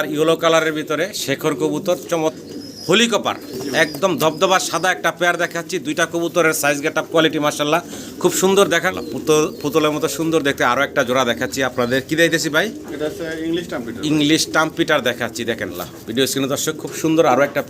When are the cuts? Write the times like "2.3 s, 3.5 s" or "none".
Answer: 2.4 s, 8.9 s, 15.7 s